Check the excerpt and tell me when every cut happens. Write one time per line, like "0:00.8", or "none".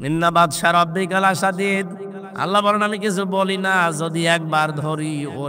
none

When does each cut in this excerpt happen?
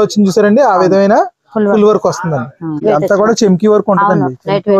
0:02.8

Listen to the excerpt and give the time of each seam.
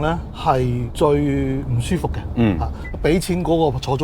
0:02.8

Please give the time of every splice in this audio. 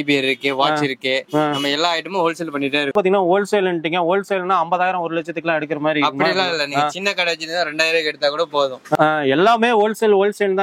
0:02.9
0:09.0

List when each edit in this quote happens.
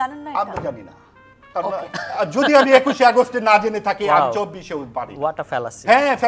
none

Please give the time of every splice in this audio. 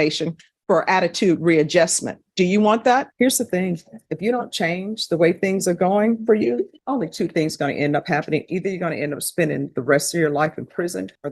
0:03.1

